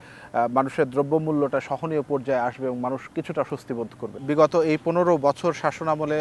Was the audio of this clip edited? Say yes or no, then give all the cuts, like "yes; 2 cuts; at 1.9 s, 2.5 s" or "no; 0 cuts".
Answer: yes; 1 cut; at 4.2 s